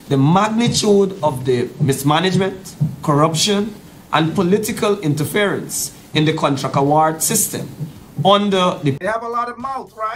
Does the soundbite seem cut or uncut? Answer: cut